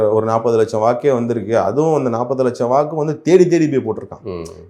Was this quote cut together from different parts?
no; 0 cuts

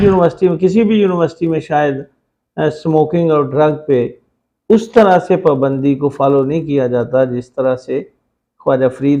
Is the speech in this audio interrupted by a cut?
no; 0 cuts

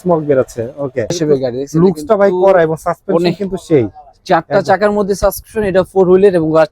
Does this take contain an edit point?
yes; 1 cut; at 1.1 s

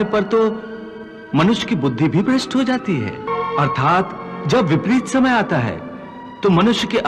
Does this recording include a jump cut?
yes; 1 cut; at 3.3 s

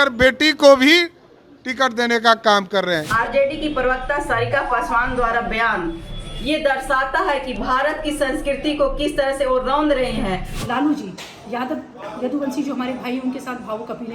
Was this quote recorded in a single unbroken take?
no; 2 cuts; at 3.1 s, 10.5 s

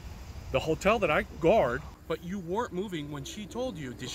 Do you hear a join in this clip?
yes; 1 cut; at 2.0 s

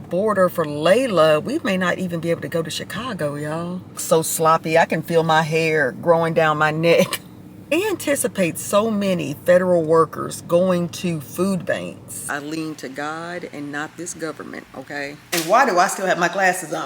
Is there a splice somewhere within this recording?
yes; 4 cuts; at 4.0 s, 7.7 s, 12.2 s, 15.2 s

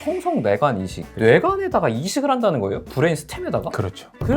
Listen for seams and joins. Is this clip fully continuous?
no; 1 cut; at 1.1 s

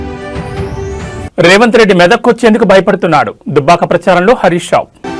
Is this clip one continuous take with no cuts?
no; 1 cut; at 1.3 s

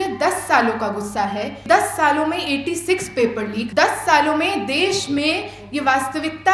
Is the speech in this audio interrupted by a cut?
yes; 2 cuts; at 1.6 s, 3.7 s

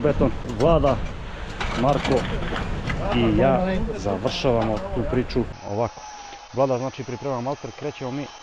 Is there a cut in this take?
yes; 1 cut; at 5.5 s

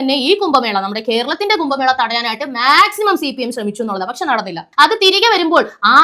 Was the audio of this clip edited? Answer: yes; 1 cut; at 4.6 s

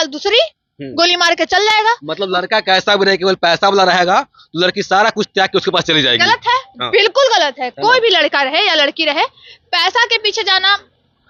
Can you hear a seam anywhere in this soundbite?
no; 0 cuts

